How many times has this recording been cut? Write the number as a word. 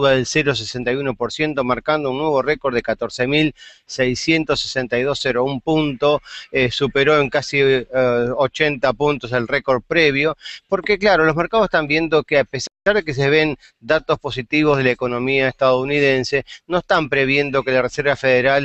zero